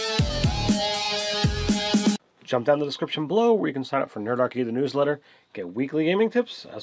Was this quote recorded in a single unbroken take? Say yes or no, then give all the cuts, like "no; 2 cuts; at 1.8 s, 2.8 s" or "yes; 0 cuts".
no; 1 cut; at 4.7 s